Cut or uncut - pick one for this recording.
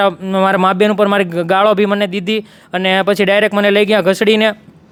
uncut